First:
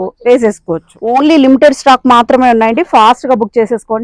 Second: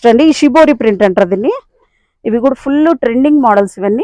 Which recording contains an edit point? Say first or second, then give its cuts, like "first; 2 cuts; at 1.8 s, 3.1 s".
first; 1 cut; at 0.9 s